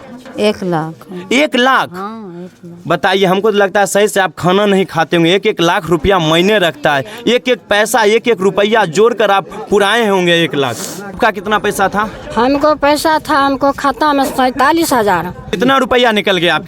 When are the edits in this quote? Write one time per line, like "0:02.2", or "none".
0:11.2
0:15.5